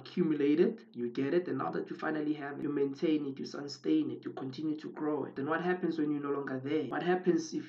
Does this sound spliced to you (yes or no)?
yes